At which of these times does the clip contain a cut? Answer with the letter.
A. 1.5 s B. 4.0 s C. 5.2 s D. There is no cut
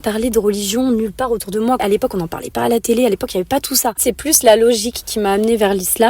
B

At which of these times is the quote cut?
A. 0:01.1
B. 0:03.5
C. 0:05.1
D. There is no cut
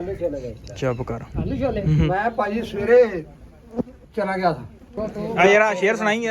C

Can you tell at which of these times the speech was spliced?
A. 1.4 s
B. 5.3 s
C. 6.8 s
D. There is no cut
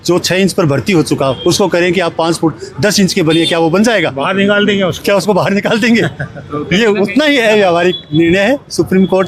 D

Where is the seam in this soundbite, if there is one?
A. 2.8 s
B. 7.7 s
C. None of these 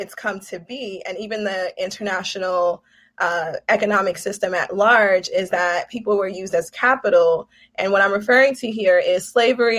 C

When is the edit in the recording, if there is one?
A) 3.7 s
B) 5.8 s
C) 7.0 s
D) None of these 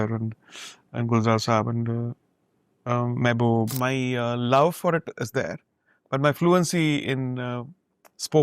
A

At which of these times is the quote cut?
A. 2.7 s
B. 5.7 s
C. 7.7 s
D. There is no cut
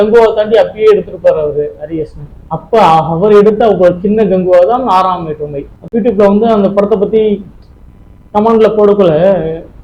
B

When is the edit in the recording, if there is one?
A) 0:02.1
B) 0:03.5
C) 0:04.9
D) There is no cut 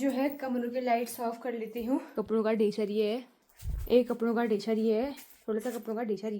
A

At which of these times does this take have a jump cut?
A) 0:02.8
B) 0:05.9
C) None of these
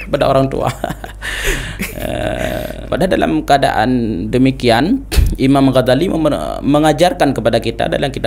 A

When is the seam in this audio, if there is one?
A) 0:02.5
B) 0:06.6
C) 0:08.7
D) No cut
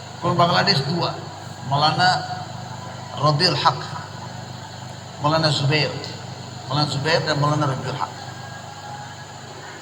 D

